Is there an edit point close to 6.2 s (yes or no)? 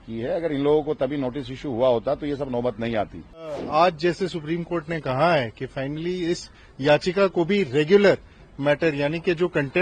no